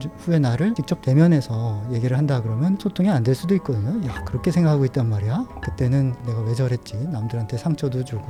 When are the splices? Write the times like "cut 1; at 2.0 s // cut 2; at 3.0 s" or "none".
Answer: none